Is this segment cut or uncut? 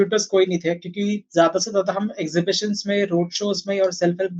uncut